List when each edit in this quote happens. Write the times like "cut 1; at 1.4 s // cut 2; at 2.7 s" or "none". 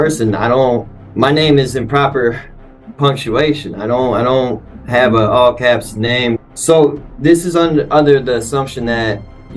cut 1; at 1.0 s // cut 2; at 4.7 s // cut 3; at 6.4 s

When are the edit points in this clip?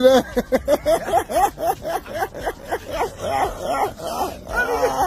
cut 1; at 3.3 s

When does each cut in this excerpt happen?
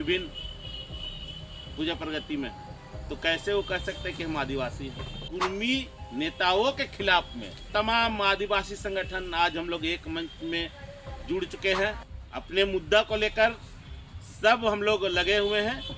cut 1; at 5.3 s // cut 2; at 7.6 s // cut 3; at 12.0 s

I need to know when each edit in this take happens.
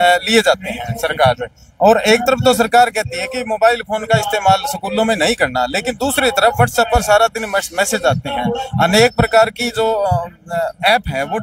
none

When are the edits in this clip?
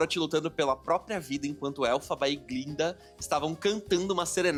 none

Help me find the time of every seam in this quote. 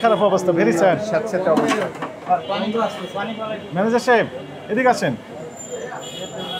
none

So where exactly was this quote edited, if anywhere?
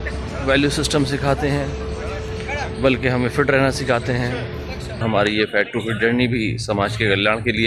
cut 1; at 5.0 s

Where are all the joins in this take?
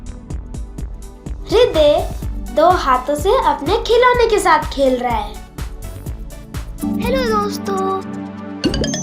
cut 1; at 1.3 s

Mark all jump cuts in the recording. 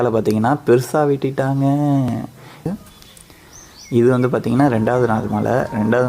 cut 1; at 2.7 s

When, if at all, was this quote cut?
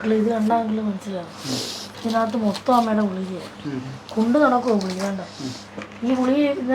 cut 1; at 1.8 s

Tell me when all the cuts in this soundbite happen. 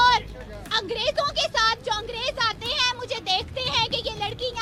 none

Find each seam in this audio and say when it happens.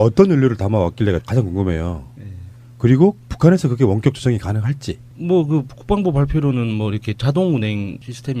cut 1; at 7.5 s

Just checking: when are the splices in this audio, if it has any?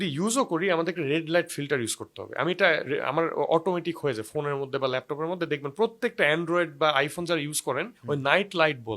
none

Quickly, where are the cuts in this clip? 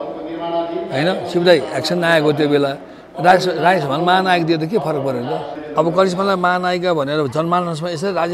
cut 1; at 5.6 s

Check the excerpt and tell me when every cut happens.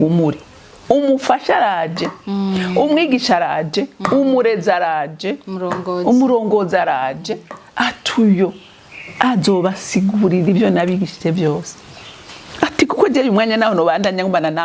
none

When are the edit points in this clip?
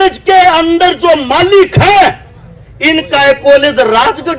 none

